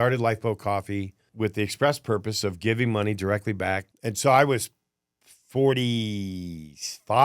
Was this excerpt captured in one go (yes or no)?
no